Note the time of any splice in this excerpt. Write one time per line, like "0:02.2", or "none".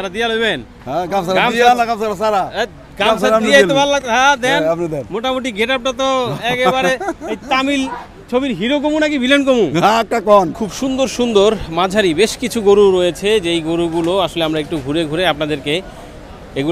0:10.6